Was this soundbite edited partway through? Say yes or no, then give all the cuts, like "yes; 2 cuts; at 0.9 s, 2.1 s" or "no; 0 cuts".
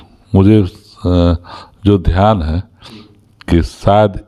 no; 0 cuts